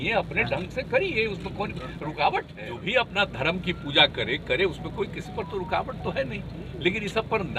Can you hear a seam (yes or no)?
yes